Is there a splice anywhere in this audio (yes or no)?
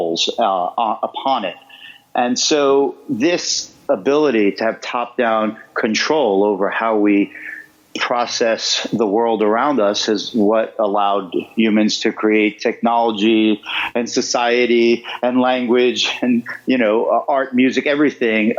no